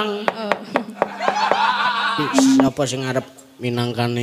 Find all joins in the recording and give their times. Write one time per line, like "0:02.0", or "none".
0:02.7

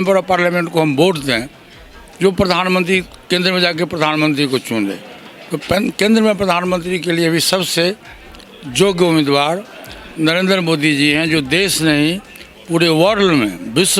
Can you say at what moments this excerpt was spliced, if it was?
none

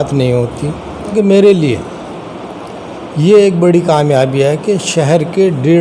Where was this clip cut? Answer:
0:01.1

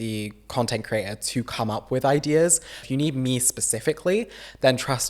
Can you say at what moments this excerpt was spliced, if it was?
0:02.8

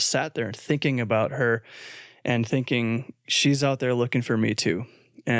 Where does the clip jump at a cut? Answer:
none

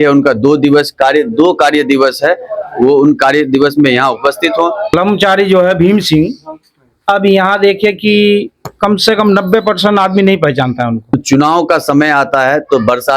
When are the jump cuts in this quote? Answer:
0:04.9
0:11.1

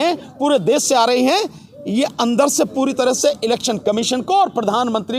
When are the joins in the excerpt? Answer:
none

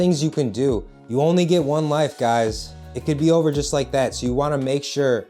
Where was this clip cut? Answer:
0:00.9

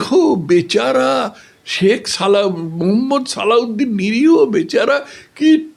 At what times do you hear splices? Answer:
none

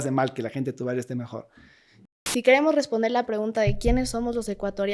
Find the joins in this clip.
0:02.3

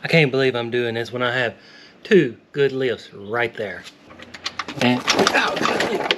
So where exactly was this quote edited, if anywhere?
0:03.9

